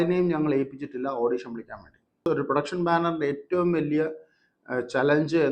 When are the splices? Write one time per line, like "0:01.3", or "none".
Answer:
0:02.2